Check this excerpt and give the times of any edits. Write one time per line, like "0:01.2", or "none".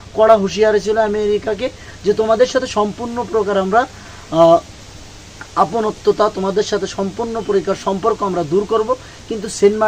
none